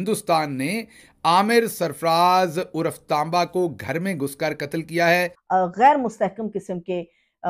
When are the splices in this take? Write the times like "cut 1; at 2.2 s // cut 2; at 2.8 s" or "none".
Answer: cut 1; at 5.4 s